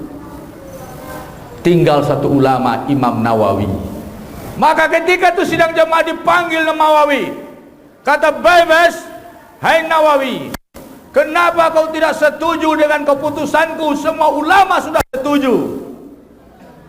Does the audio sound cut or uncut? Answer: cut